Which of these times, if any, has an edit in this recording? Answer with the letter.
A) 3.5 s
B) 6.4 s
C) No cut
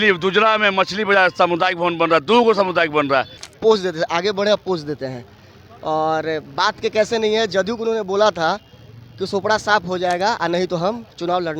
A